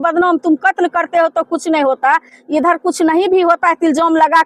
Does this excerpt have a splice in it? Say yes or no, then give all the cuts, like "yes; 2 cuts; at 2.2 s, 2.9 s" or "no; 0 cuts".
no; 0 cuts